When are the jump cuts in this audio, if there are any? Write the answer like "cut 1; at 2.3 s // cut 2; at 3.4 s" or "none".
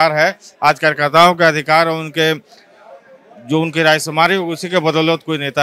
none